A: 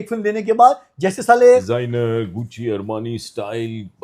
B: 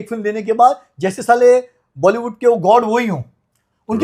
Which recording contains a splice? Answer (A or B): A